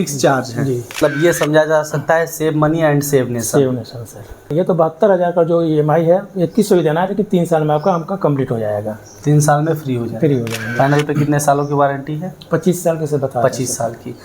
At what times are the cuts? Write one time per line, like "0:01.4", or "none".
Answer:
0:01.0
0:04.5